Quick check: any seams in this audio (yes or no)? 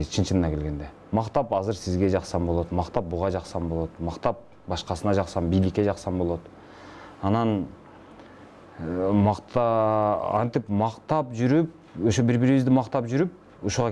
no